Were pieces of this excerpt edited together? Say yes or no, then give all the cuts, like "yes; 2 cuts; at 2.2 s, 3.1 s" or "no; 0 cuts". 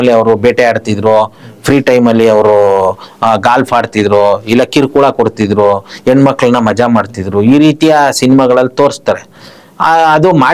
no; 0 cuts